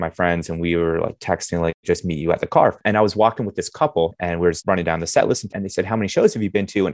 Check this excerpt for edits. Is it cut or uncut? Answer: cut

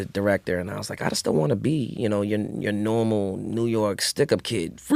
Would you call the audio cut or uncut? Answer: uncut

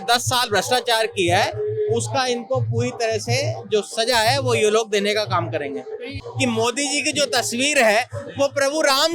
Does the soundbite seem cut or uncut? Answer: cut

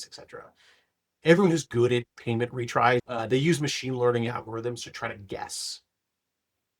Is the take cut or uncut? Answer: cut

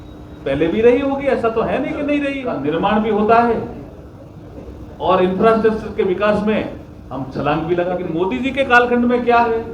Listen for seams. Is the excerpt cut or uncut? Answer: cut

